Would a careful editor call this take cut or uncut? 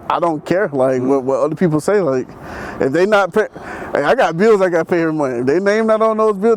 uncut